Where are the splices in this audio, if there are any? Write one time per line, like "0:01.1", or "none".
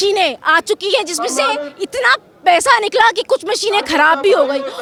none